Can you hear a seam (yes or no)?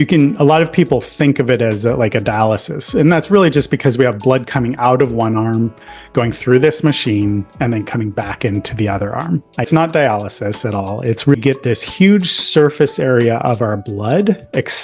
yes